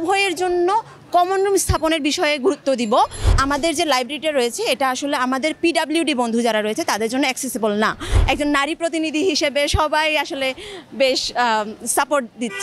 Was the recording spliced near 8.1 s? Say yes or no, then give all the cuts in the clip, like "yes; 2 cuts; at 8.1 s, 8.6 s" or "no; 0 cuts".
yes; 2 cuts; at 3.3 s, 8.1 s